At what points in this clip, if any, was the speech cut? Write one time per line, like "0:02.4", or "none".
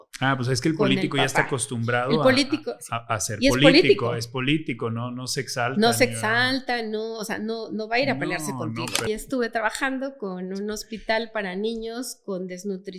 0:09.1